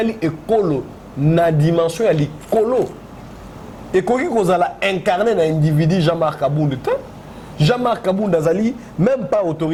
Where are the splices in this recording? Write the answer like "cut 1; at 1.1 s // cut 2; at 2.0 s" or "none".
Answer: none